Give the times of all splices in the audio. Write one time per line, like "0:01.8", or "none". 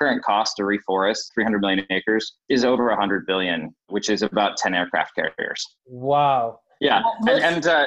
0:01.3
0:02.4
0:03.7